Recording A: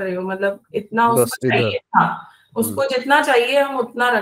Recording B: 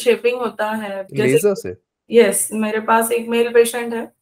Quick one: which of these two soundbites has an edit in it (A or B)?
B